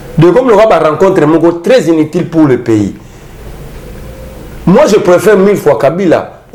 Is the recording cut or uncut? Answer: uncut